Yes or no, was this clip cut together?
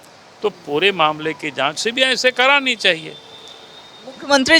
no